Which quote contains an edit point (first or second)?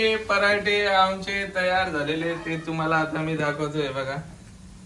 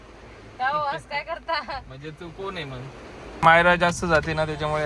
second